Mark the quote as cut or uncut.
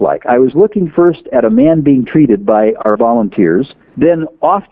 cut